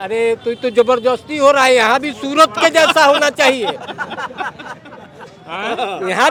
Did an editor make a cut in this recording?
no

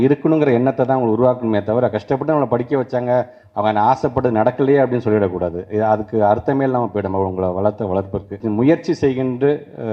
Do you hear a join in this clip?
yes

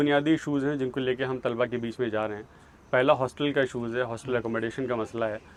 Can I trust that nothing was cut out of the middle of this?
yes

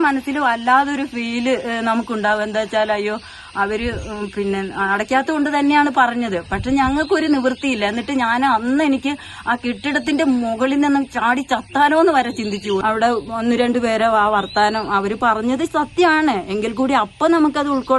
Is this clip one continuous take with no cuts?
no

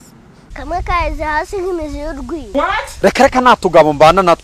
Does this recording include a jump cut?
no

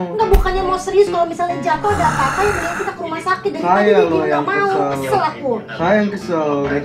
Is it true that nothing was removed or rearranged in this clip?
yes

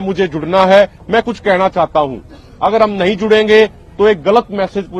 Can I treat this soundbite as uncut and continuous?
yes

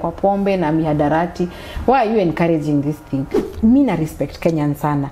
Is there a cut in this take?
yes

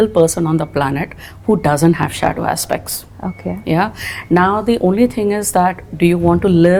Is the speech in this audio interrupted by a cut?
no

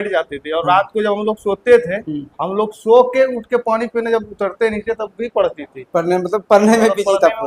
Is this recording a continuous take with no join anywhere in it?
yes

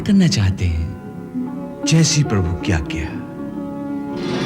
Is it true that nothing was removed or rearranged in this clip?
yes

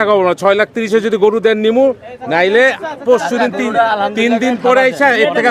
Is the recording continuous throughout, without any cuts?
yes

